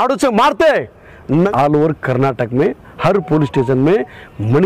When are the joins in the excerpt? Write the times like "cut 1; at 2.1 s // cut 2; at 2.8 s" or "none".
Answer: cut 1; at 1.5 s

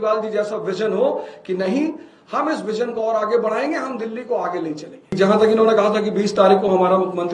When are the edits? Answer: cut 1; at 5.1 s

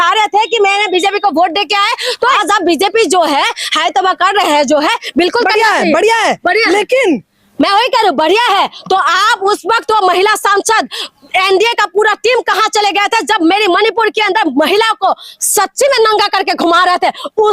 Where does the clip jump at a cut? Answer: cut 1; at 2.4 s

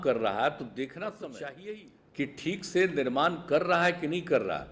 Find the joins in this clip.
cut 1; at 1.6 s

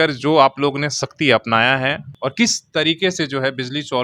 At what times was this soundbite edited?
cut 1; at 2.1 s

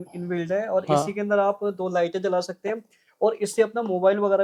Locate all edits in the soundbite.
none

